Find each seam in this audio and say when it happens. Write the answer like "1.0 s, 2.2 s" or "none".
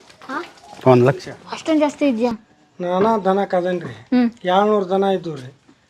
2.3 s